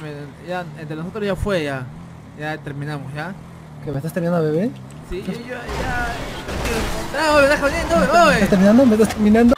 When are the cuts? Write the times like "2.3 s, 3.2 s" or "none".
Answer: none